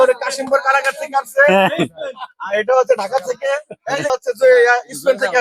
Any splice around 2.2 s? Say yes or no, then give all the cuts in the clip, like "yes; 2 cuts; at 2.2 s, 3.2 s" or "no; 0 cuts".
no; 1 cut; at 4.1 s